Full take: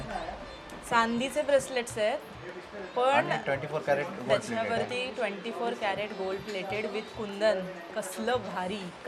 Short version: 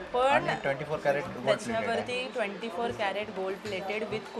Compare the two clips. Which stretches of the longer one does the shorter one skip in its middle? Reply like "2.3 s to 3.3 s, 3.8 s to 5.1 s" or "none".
none